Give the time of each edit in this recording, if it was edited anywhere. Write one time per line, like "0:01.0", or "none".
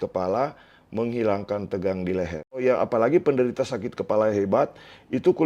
0:02.6